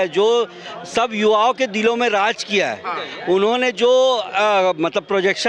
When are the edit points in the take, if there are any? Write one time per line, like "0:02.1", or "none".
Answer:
none